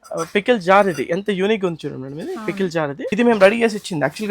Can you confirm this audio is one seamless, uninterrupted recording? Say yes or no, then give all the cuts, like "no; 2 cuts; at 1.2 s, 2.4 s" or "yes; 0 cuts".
no; 1 cut; at 3.1 s